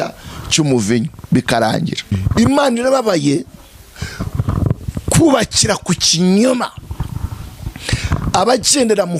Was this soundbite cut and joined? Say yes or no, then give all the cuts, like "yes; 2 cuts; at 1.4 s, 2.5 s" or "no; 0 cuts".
yes; 1 cut; at 2.2 s